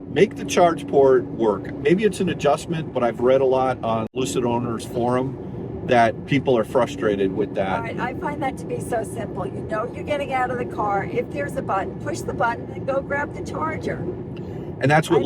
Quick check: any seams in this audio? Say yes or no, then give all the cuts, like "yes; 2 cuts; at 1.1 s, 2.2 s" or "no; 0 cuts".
yes; 1 cut; at 4.2 s